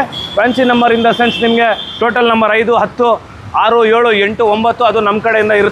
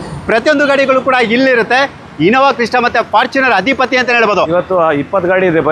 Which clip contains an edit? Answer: second; 1 cut; at 4.5 s

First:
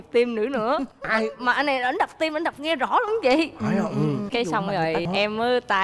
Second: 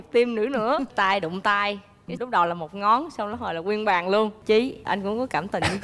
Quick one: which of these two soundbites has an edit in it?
second; 2 cuts; at 0.9 s, 4.4 s

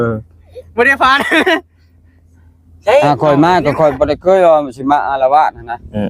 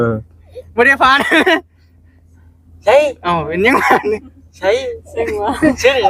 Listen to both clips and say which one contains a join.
first; 1 cut; at 3.0 s

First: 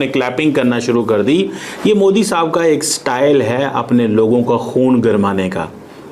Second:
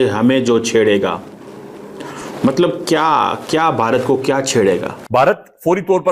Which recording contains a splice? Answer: second; 1 cut; at 5.0 s

